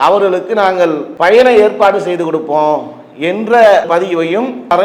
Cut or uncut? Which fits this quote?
uncut